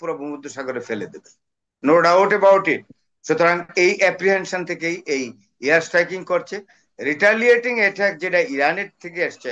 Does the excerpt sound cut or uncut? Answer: uncut